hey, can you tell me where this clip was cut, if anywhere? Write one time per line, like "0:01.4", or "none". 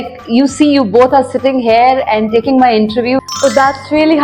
0:03.2